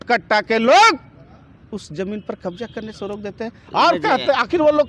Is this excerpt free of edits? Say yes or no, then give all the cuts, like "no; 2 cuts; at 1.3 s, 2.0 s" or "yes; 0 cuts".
yes; 0 cuts